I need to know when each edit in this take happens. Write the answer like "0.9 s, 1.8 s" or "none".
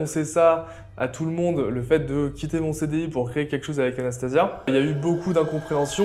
4.7 s